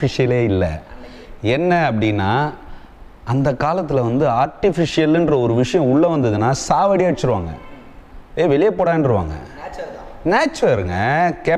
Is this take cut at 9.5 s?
no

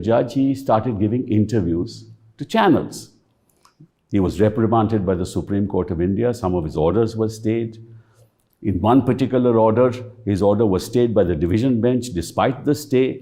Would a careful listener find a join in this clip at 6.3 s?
no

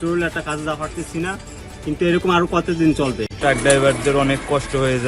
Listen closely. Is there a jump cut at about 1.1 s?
no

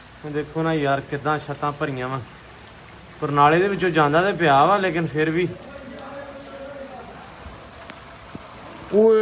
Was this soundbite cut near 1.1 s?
no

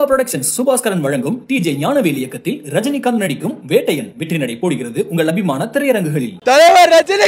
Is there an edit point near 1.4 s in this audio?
no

